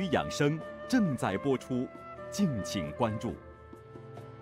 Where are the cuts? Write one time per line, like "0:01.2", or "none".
0:03.5